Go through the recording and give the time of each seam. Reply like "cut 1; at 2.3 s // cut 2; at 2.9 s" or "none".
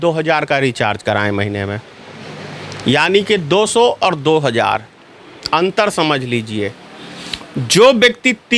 none